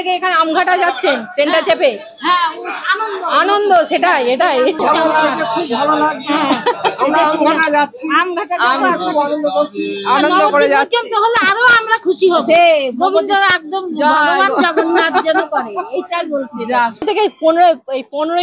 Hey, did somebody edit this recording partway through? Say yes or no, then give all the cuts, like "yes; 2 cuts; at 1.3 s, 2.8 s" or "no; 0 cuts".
yes; 2 cuts; at 4.8 s, 17.0 s